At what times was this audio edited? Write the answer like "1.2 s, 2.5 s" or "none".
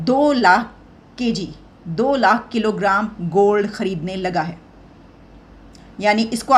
none